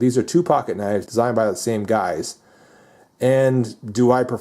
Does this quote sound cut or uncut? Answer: cut